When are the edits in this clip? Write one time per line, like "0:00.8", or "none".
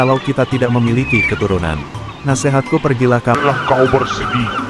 0:03.4